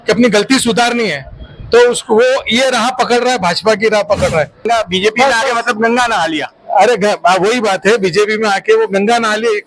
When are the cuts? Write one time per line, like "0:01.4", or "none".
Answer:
0:04.6